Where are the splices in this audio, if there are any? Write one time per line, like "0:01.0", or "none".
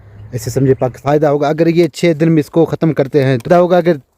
0:01.0
0:03.5